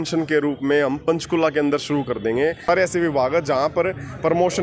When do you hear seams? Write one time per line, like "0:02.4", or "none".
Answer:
0:02.6

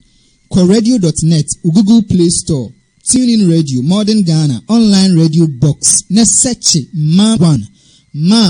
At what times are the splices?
0:07.5

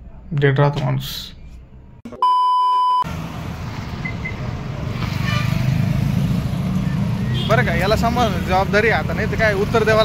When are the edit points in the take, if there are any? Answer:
0:03.1

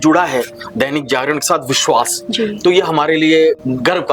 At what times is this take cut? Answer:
none

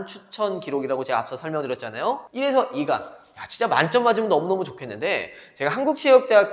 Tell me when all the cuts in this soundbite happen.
none

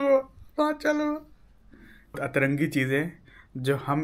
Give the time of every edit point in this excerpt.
0:02.2

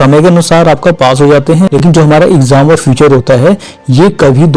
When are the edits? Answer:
none

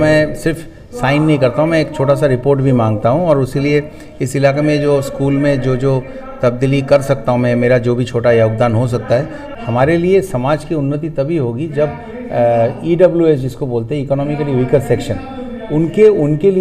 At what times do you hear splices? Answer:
0:09.4

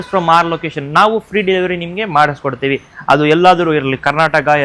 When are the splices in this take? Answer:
none

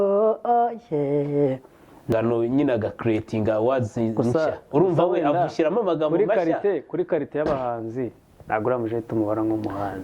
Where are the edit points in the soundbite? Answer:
0:02.1

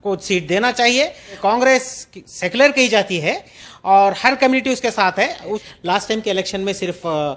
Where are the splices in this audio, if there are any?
0:01.4
0:05.6

